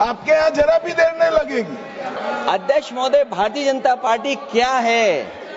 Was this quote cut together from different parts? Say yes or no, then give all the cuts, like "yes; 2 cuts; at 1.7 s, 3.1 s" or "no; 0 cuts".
yes; 1 cut; at 2.2 s